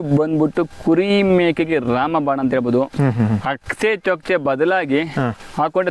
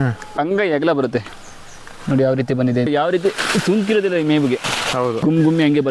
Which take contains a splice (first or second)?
second